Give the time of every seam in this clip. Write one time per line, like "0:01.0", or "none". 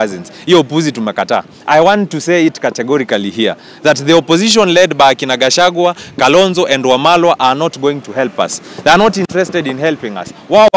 none